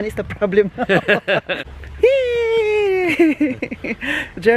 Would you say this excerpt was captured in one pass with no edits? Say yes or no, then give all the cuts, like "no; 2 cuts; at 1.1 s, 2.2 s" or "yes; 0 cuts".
no; 1 cut; at 1.6 s